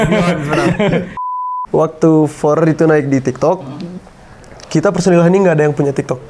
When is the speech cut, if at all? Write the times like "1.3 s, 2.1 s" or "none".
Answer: 1.2 s